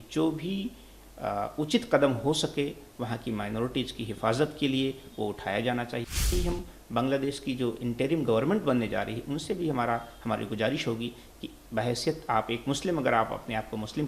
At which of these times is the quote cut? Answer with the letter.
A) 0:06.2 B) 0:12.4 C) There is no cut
A